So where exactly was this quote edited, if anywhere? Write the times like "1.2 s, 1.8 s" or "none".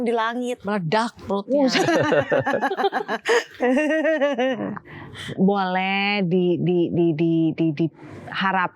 none